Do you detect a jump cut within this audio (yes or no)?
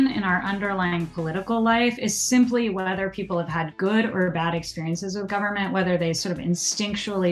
no